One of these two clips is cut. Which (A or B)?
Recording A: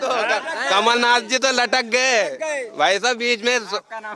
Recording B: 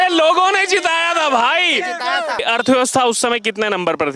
B